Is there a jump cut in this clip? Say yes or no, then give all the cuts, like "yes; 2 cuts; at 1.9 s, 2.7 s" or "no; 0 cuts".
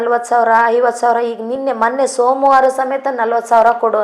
no; 0 cuts